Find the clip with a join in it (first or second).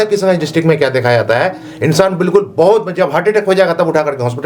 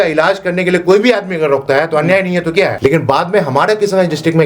second